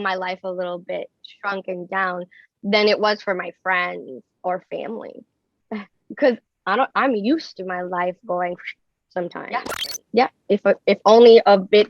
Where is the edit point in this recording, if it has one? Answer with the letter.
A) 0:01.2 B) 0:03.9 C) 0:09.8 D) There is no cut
C